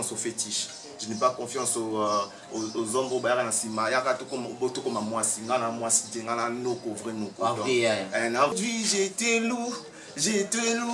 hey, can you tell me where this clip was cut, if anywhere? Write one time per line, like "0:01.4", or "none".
0:08.5